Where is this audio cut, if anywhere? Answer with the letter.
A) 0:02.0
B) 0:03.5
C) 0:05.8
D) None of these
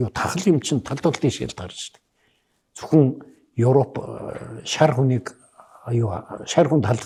D